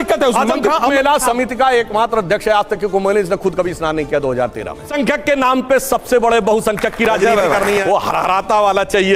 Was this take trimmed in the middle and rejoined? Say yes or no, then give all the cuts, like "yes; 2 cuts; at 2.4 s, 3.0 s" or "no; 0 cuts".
yes; 3 cuts; at 0.9 s, 4.9 s, 7.8 s